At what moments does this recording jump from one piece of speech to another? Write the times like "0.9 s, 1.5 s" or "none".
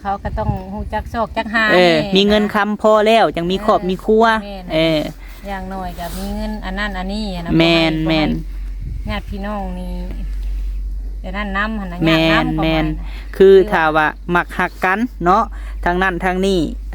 none